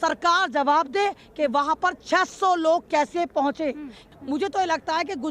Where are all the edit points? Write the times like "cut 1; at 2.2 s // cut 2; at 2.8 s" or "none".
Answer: cut 1; at 4.1 s